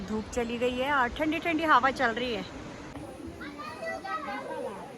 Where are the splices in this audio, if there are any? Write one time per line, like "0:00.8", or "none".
0:02.9